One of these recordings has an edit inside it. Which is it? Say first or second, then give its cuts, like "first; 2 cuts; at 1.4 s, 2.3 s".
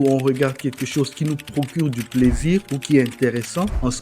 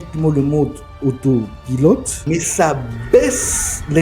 second; 1 cut; at 2.1 s